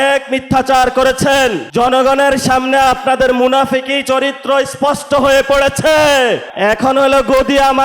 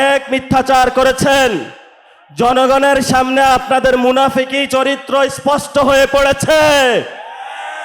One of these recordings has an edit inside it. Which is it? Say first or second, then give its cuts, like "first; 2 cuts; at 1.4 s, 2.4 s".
first; 2 cuts; at 1.6 s, 6.5 s